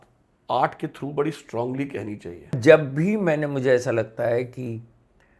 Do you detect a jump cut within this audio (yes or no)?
yes